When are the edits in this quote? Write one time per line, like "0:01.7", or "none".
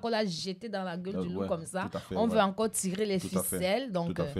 none